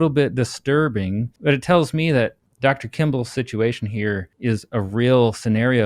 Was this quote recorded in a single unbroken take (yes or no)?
no